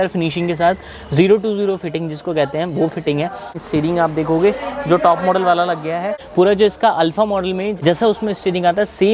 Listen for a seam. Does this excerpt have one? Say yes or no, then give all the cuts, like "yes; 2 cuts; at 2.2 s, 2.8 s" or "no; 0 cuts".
yes; 3 cuts; at 3.6 s, 6.2 s, 7.7 s